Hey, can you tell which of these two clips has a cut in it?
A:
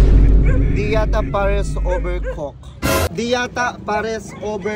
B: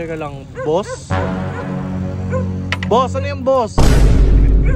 A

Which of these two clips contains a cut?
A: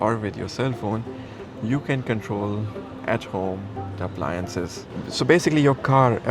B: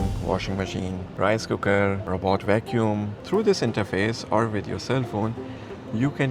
B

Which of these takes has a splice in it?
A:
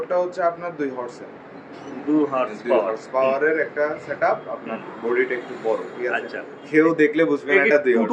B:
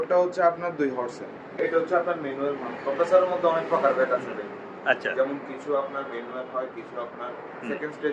B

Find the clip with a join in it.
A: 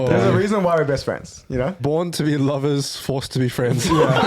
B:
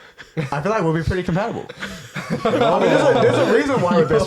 A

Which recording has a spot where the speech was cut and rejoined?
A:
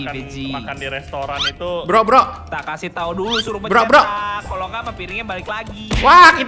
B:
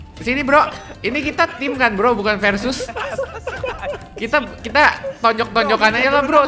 B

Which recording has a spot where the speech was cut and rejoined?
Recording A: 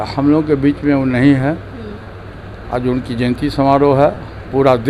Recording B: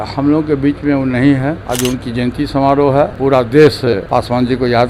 B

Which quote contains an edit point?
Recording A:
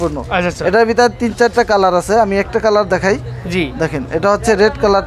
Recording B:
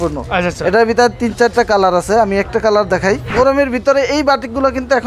B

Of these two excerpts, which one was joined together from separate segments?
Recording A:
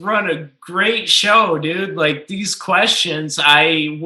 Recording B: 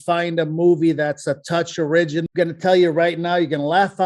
B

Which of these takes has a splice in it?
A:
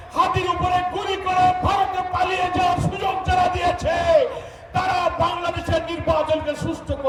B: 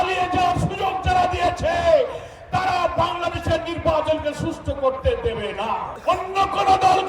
B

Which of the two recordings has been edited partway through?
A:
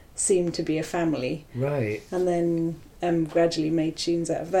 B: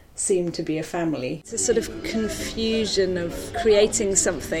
B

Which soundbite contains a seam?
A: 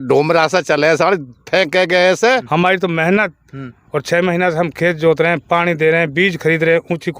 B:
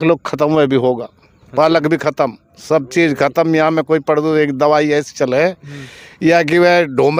A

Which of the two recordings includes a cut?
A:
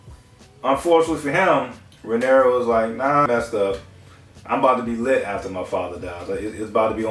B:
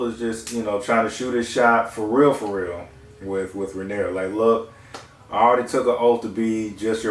A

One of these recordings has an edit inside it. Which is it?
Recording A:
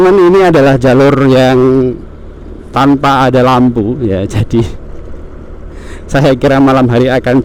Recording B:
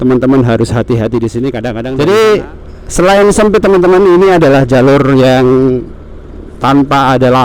B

